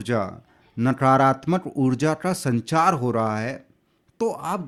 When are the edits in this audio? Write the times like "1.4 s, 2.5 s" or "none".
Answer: none